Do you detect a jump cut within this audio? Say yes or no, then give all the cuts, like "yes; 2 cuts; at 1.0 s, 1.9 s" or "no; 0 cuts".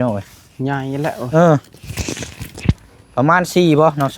yes; 1 cut; at 2.9 s